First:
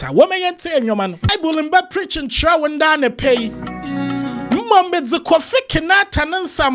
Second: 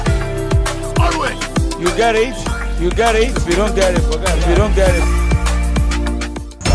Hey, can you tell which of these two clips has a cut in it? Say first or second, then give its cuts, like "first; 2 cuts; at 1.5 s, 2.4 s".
first; 1 cut; at 1.3 s